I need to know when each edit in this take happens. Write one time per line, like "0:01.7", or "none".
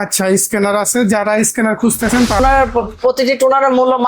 0:02.4